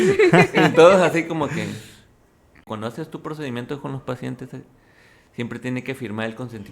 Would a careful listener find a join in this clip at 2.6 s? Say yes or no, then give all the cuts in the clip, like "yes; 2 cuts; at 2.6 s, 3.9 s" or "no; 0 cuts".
yes; 1 cut; at 2.6 s